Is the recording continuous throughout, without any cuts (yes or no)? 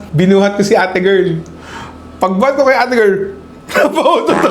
yes